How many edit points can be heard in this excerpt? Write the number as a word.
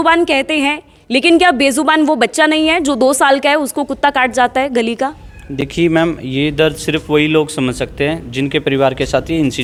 zero